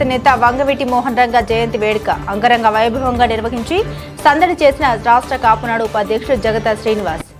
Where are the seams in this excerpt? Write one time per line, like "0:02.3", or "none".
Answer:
none